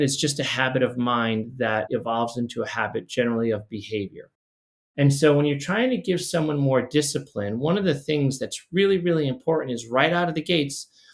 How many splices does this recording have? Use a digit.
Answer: 1